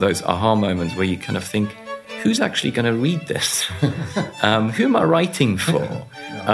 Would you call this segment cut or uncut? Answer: uncut